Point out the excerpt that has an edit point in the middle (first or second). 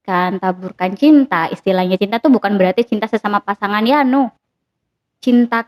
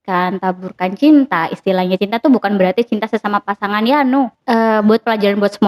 second